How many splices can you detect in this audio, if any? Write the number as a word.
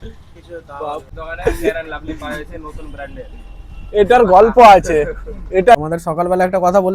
two